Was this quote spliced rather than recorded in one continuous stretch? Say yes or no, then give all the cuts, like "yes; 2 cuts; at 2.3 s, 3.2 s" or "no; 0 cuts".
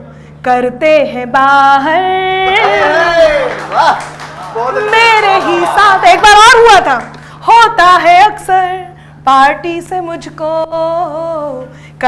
no; 0 cuts